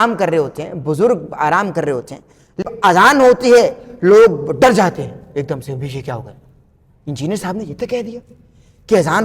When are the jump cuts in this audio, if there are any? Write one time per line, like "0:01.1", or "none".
0:02.6